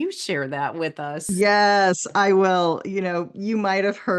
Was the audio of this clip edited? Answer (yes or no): yes